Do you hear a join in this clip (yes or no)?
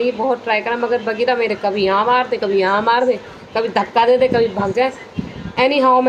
no